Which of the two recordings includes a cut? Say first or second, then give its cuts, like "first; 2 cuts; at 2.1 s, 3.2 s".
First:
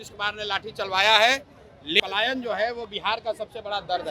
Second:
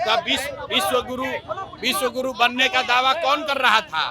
first; 1 cut; at 2.0 s